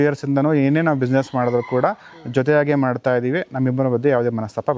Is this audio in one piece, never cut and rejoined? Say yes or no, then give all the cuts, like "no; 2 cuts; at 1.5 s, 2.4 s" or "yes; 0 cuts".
yes; 0 cuts